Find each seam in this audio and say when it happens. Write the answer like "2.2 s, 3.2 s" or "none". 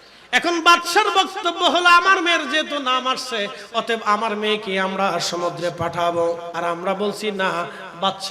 6.5 s